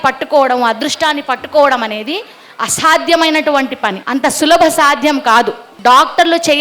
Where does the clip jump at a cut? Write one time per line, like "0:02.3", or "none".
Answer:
0:04.0
0:05.6